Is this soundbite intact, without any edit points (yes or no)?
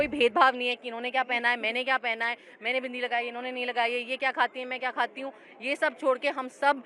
yes